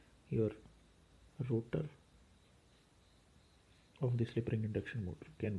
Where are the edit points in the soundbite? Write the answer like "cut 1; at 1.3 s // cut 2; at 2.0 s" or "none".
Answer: none

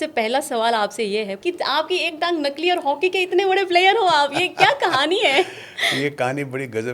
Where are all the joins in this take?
cut 1; at 1.3 s

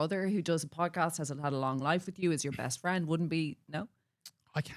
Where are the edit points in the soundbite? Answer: none

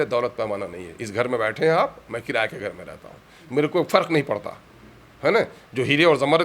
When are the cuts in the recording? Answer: none

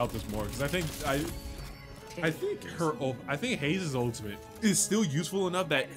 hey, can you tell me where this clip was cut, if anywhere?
cut 1; at 4.4 s

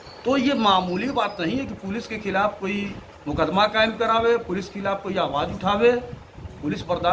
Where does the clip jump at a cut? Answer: none

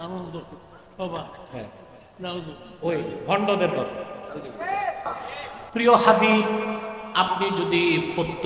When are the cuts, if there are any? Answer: cut 1; at 5.6 s

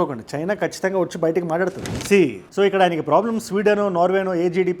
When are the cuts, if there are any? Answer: cut 1; at 2.0 s

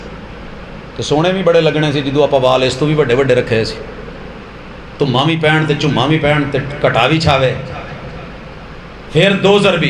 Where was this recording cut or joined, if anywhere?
none

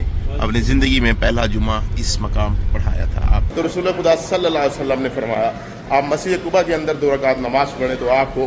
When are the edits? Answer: cut 1; at 3.4 s

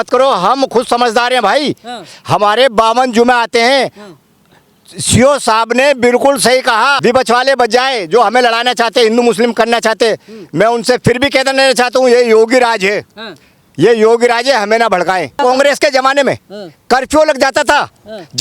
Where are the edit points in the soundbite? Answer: cut 1; at 7.0 s // cut 2; at 15.4 s

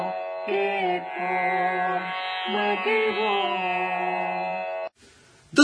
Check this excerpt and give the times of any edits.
cut 1; at 4.3 s

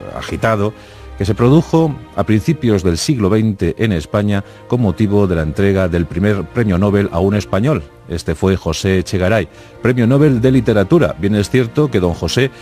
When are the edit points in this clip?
cut 1; at 5.5 s

